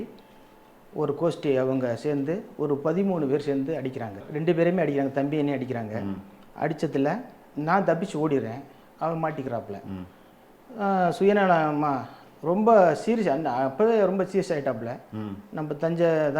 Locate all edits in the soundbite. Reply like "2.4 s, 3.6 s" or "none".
4.3 s